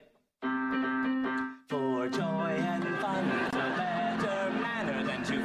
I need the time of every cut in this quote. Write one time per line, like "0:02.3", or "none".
0:03.5